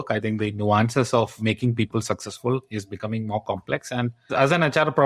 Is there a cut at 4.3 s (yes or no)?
yes